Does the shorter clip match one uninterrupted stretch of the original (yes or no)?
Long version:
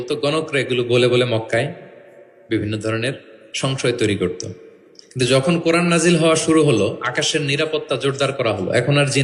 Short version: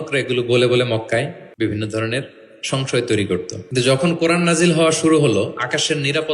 no